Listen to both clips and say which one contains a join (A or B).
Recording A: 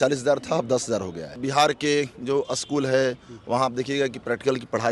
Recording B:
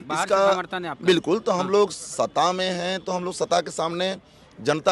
A